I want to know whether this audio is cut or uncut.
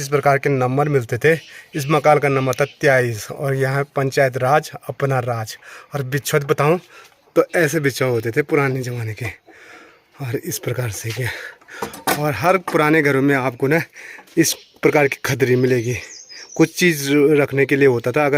uncut